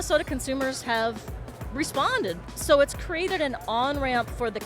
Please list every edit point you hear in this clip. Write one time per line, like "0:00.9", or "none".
0:02.4

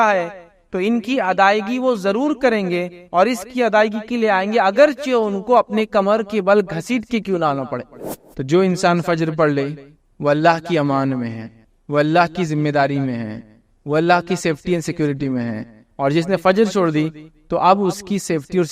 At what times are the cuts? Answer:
0:08.0

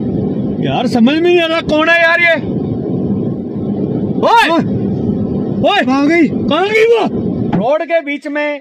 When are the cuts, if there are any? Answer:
0:07.6

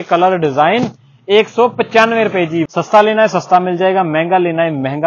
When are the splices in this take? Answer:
0:02.7

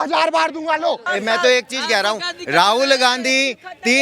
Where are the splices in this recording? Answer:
0:01.0

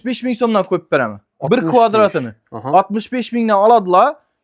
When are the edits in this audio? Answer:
none

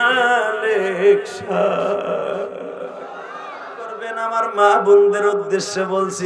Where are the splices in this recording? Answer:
0:04.2

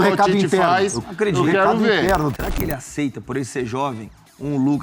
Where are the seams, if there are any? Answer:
0:02.3

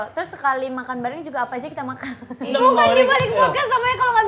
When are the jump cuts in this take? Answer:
0:02.5

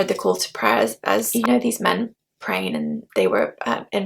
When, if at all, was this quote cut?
0:01.3

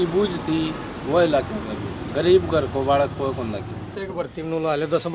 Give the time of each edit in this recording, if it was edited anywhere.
0:02.0
0:04.0

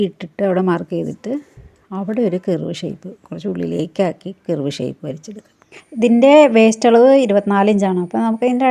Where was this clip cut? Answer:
0:05.8

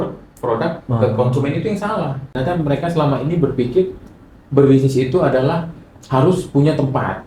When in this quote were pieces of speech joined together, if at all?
0:02.3

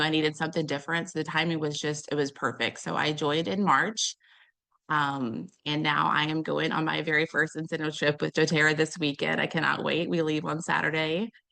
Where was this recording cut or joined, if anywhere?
none

